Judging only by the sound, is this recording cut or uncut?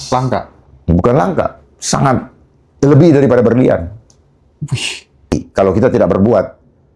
cut